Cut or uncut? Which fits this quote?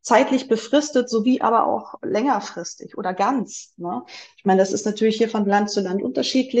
uncut